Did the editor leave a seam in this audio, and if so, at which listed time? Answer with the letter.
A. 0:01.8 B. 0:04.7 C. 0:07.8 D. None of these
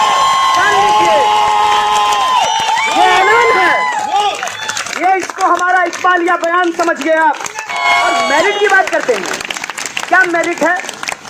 C